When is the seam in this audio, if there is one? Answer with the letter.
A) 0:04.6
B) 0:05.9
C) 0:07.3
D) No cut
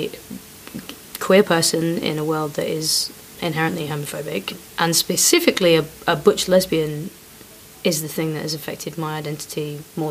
A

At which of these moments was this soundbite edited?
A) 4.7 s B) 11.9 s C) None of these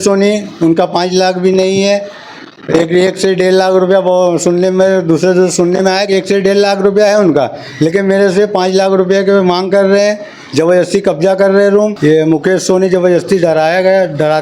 B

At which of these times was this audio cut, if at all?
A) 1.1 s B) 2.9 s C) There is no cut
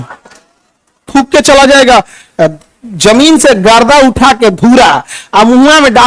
A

